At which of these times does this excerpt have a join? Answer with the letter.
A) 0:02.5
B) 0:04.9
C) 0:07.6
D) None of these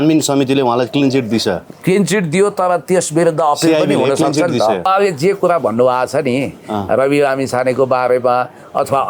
B